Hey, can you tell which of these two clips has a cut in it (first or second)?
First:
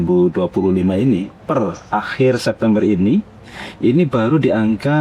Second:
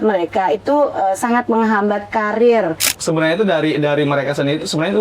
second